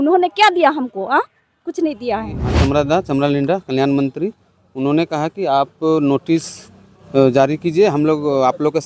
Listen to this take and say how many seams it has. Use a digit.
1